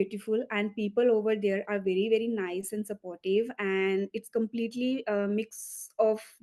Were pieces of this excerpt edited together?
no; 0 cuts

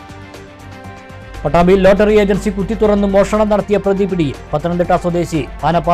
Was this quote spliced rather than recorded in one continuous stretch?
no; 0 cuts

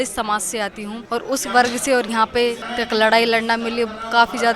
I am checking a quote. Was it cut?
yes; 2 cuts; at 1.0 s, 2.7 s

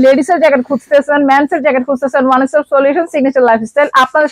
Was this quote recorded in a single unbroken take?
yes; 0 cuts

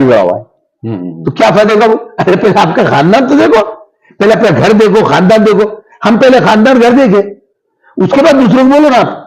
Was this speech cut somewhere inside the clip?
no; 0 cuts

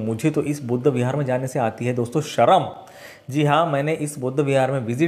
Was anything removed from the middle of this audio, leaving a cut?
no; 0 cuts

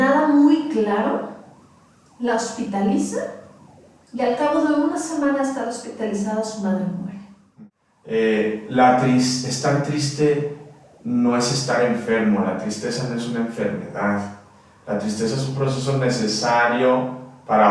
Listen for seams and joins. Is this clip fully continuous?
no; 1 cut; at 7.4 s

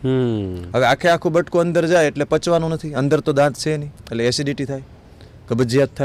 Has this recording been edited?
no; 0 cuts

